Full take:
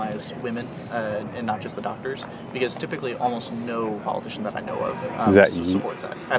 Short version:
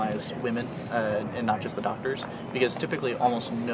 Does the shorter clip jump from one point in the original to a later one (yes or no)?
no